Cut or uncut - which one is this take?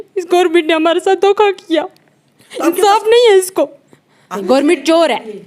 cut